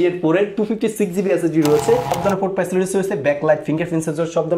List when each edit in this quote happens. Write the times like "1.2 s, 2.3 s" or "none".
2.1 s